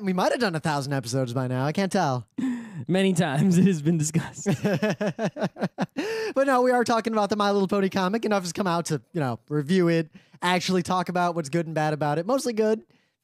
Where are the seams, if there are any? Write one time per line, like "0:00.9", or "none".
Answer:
0:07.3